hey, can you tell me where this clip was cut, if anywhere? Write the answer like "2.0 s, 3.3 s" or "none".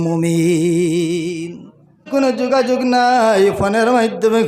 2.1 s